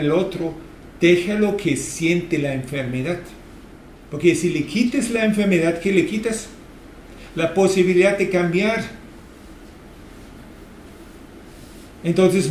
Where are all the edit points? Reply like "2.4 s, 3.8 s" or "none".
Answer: none